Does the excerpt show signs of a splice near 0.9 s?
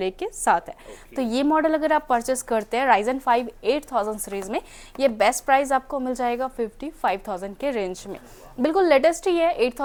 no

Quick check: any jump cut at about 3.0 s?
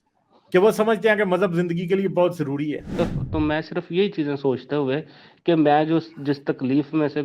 yes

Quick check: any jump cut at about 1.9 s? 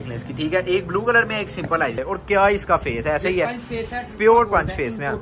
yes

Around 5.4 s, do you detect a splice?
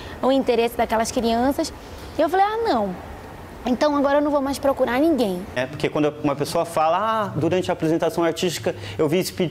yes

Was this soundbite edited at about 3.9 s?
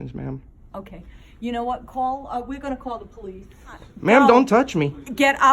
yes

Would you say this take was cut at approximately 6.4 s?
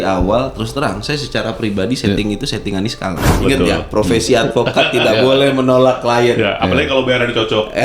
no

